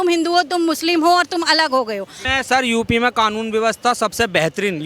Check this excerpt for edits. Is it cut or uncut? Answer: cut